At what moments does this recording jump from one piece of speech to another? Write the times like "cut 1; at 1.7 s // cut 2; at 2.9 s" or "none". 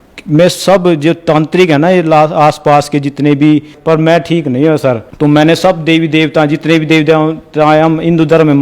cut 1; at 3.7 s // cut 2; at 5.1 s